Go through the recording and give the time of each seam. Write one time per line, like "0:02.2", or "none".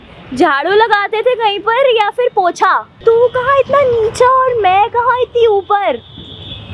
0:03.0

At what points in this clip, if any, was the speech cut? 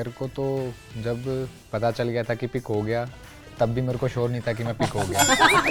none

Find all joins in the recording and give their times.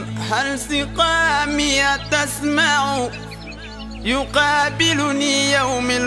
none

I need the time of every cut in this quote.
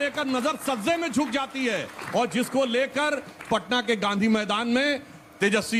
none

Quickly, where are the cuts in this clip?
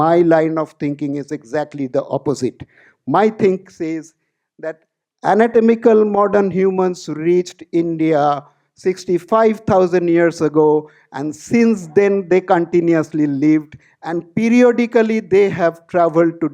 none

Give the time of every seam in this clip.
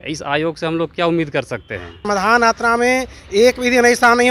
0:02.0

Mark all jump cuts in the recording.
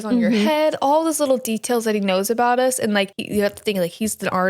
0:03.2

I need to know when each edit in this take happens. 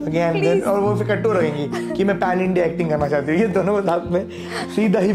none

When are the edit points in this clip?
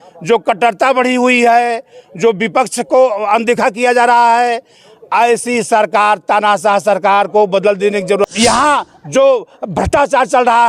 0:08.2

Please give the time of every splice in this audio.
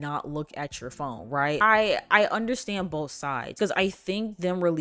0:01.6

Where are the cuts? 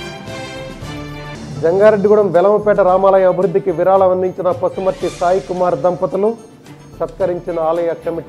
0:00.9

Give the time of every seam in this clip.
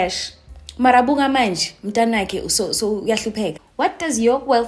0:03.6

